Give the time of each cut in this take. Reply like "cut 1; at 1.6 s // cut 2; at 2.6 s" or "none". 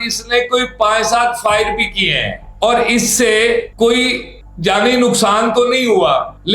none